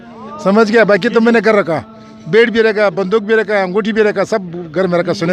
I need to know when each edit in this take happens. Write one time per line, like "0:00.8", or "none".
none